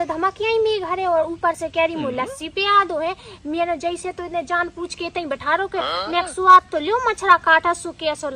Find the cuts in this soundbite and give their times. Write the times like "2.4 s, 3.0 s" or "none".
none

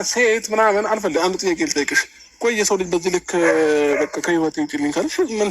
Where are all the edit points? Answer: 1.2 s

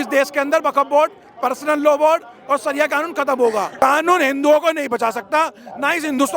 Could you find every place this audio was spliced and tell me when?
3.7 s

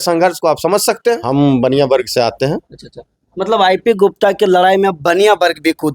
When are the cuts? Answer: 1.2 s

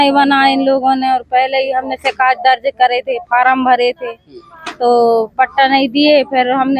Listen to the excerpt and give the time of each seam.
none

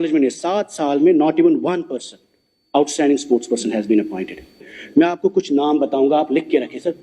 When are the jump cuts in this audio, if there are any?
4.6 s

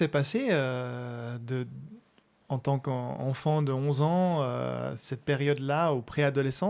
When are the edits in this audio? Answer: none

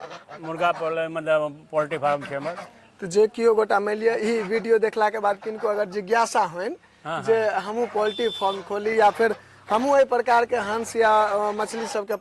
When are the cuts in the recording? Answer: none

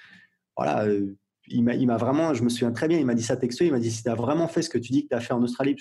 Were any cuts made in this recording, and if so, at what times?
4.7 s

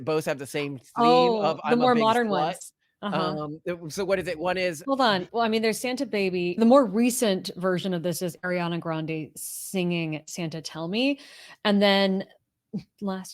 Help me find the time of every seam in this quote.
none

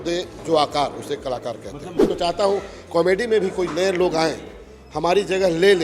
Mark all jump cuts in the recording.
2.0 s

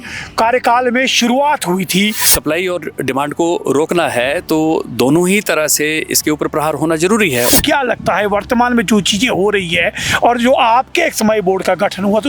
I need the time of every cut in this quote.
2.3 s, 7.5 s

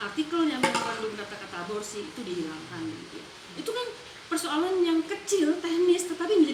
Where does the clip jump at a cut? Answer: none

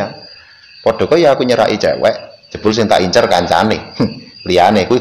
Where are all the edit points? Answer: 2.4 s

